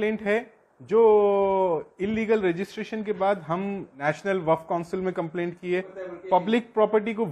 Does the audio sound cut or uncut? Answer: cut